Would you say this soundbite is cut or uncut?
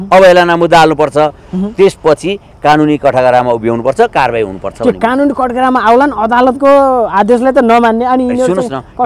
uncut